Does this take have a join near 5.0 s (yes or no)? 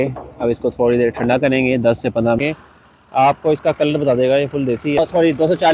yes